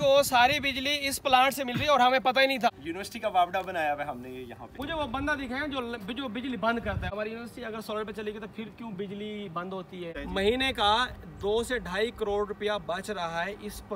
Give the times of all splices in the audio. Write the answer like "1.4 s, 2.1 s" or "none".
2.7 s, 4.7 s, 7.1 s, 10.2 s